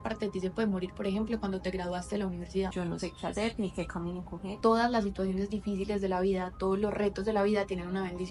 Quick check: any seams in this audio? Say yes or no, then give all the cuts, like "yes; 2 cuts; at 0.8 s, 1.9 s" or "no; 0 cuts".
yes; 2 cuts; at 2.7 s, 4.5 s